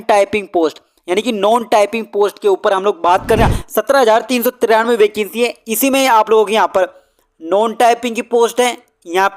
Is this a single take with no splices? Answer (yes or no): no